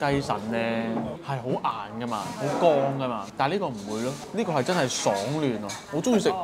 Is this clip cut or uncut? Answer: uncut